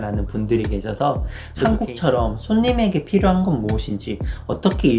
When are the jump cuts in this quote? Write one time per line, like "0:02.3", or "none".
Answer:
0:01.7